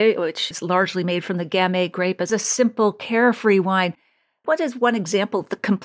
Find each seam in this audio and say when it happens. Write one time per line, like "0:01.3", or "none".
0:02.3
0:04.5